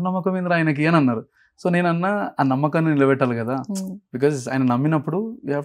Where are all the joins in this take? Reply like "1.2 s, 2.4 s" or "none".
none